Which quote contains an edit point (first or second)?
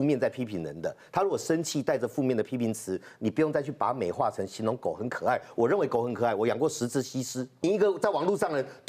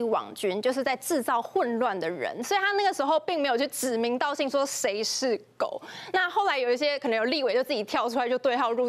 first